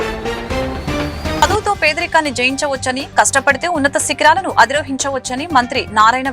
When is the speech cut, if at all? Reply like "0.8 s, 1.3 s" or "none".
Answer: 1.4 s